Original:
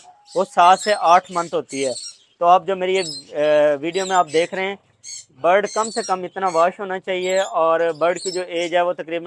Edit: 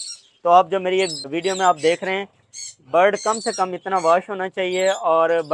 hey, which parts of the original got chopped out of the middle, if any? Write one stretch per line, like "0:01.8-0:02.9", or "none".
0:03.3-0:03.8